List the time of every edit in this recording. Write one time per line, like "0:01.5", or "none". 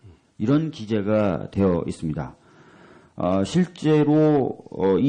0:02.1